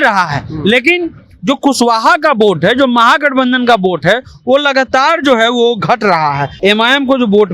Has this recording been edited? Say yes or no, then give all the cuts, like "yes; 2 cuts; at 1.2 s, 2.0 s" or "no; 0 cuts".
yes; 1 cut; at 6.5 s